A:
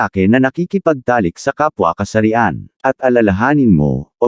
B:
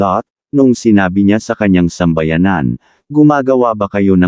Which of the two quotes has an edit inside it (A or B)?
A